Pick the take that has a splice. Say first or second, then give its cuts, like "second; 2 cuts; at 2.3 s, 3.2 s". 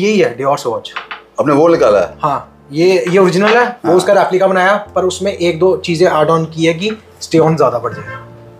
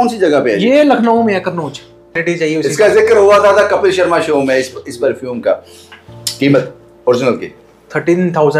second; 1 cut; at 2.2 s